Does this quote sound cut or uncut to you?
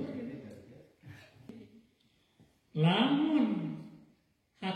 cut